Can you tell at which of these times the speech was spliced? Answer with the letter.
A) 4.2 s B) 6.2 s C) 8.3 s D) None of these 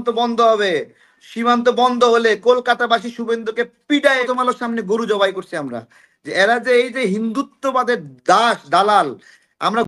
A